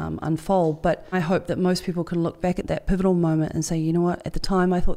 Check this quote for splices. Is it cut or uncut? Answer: cut